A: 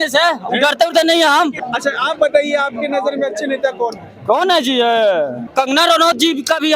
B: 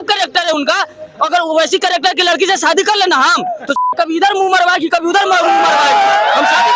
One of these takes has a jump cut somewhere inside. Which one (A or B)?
A